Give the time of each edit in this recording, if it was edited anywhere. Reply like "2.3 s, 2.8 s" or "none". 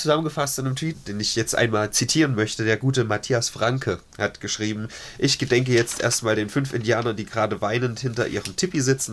1.0 s, 5.0 s